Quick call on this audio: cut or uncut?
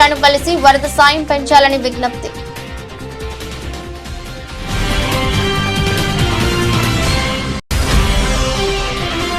cut